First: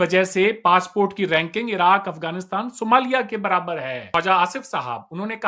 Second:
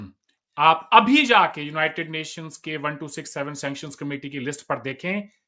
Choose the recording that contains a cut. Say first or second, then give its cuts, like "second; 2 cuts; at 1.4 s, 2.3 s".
first; 1 cut; at 4.1 s